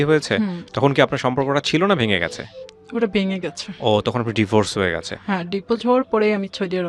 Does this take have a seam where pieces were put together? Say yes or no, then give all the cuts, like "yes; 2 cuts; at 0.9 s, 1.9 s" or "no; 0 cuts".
no; 0 cuts